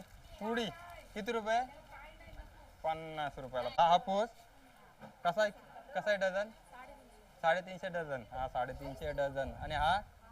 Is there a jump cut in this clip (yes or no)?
yes